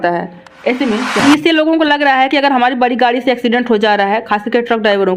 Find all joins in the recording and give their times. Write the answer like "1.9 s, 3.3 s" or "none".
1.2 s